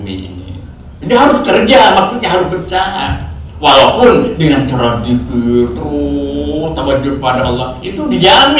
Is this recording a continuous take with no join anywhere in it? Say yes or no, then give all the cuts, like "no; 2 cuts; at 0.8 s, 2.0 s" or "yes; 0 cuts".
yes; 0 cuts